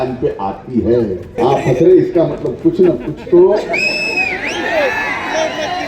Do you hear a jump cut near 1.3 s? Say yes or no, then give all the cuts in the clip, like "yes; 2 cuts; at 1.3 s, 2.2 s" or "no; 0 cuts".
yes; 1 cut; at 1.3 s